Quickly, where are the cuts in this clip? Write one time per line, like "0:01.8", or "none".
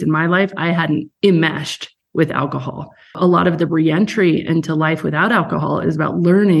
0:01.1
0:03.2